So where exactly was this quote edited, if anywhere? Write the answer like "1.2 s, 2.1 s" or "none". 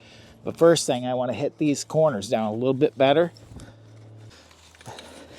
4.3 s